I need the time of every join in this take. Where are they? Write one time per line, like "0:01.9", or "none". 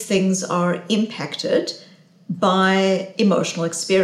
none

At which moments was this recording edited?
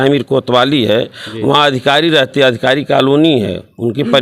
none

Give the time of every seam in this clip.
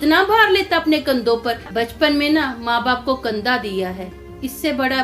0:01.7

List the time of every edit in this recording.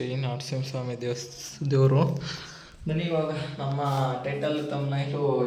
none

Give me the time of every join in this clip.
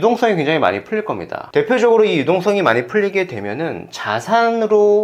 0:01.4

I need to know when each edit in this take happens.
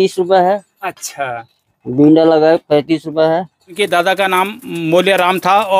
0:03.7

